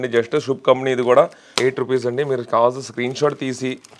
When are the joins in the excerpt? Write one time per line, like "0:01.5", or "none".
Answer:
0:01.4